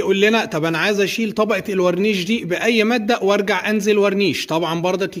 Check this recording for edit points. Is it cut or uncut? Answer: uncut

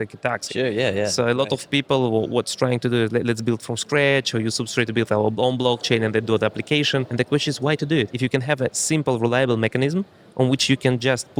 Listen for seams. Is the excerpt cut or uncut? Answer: cut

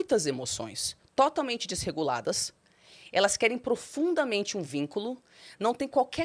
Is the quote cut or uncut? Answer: uncut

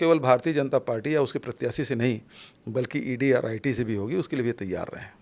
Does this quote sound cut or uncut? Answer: uncut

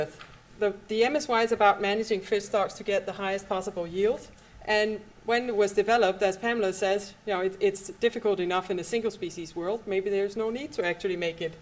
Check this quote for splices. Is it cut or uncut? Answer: cut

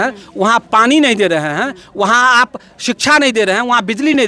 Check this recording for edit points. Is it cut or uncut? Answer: uncut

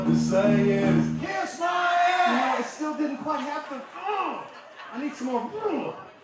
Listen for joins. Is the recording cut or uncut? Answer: uncut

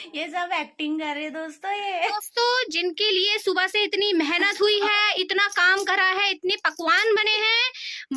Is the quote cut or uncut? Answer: cut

